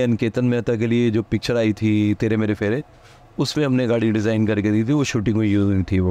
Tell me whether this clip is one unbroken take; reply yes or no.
yes